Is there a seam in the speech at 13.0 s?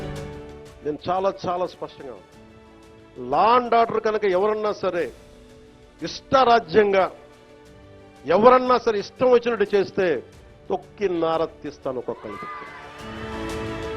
yes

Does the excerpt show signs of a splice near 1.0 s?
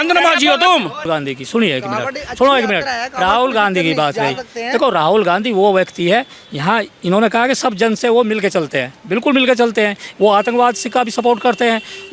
yes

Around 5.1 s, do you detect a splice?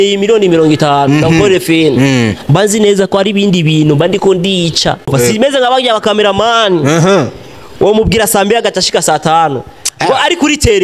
yes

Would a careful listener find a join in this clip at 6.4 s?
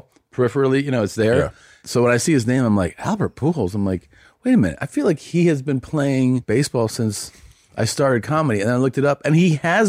yes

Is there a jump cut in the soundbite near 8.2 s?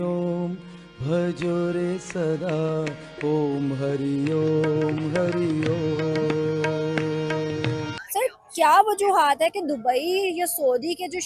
yes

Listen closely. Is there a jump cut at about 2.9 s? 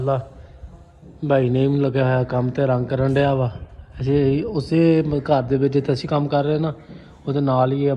no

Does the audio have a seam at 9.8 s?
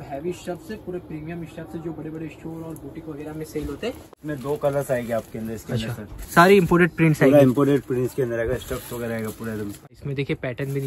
yes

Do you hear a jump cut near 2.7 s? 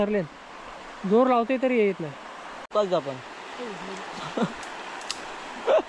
yes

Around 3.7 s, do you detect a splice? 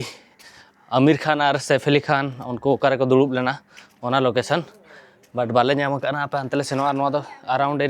no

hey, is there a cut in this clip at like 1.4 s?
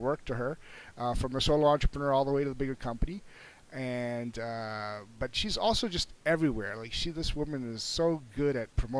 no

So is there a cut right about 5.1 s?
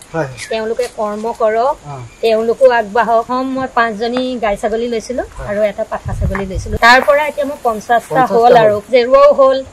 no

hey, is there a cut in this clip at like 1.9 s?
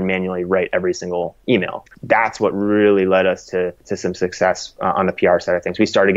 yes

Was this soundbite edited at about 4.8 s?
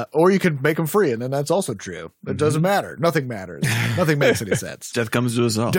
yes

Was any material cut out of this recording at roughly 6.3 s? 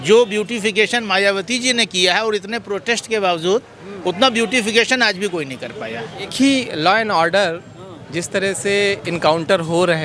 yes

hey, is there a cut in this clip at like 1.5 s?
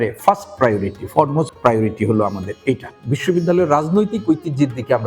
no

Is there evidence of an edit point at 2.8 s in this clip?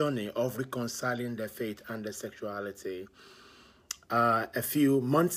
no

